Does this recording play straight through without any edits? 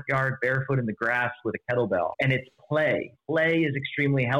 no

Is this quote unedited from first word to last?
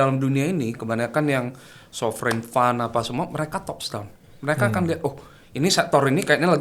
yes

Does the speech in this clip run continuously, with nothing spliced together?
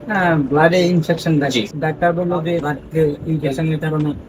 no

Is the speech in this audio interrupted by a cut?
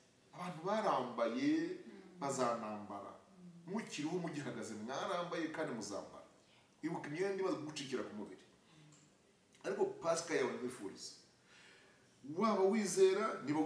no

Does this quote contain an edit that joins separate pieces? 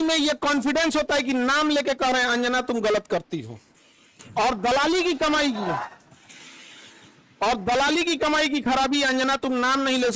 no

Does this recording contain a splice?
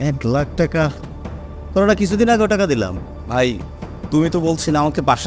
no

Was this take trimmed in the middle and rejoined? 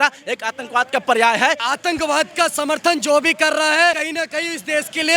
yes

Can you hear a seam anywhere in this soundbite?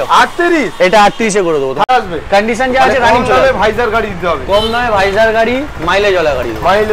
yes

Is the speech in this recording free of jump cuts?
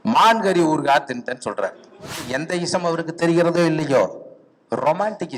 no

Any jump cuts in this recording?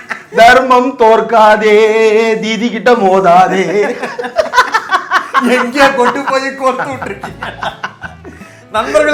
no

